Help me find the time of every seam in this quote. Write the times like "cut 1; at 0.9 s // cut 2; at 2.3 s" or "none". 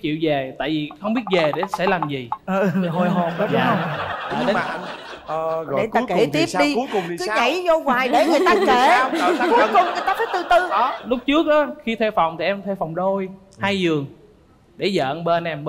none